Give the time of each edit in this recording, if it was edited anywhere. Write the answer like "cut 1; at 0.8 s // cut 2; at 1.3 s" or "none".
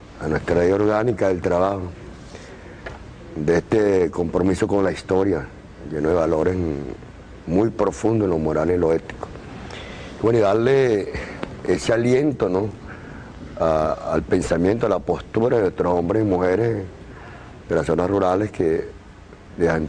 none